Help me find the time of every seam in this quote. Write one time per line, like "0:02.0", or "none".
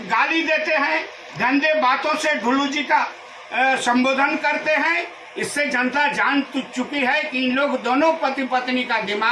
none